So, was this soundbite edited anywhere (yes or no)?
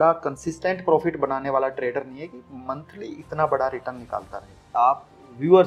yes